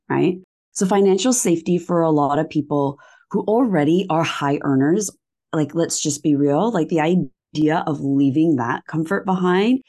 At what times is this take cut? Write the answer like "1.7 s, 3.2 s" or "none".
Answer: none